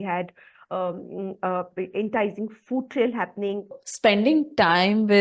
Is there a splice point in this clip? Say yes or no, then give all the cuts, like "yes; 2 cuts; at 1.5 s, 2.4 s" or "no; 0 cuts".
yes; 1 cut; at 3.7 s